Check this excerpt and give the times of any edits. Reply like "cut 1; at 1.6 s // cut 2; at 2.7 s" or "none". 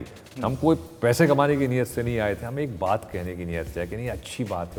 none